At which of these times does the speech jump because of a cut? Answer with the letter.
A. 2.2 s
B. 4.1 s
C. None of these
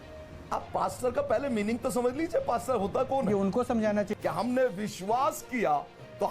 B